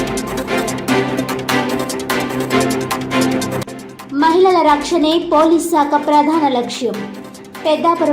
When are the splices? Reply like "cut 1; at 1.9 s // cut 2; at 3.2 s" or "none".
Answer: cut 1; at 3.6 s